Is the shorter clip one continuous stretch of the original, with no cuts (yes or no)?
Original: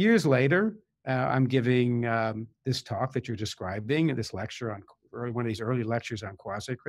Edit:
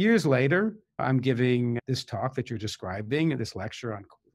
no